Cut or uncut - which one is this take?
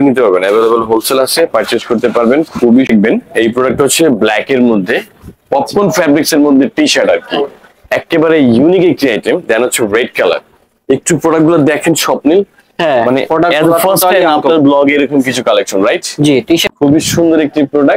cut